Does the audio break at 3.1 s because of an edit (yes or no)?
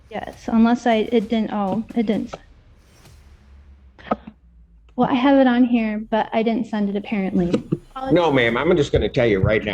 no